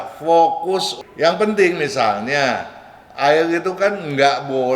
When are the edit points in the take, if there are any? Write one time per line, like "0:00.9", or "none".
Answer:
0:00.9